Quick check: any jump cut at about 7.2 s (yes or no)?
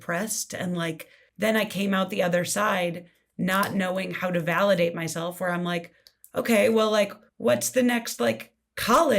yes